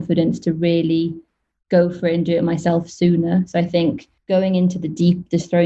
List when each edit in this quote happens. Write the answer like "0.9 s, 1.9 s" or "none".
4.1 s